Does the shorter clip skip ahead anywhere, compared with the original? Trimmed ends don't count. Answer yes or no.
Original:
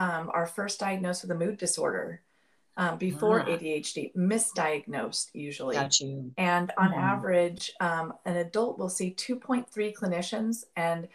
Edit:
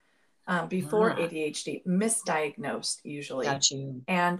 no